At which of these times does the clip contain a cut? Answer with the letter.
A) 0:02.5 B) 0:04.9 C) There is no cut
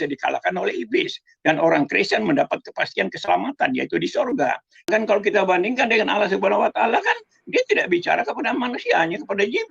B